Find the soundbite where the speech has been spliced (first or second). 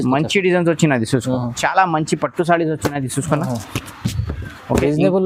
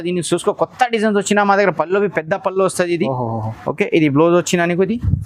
first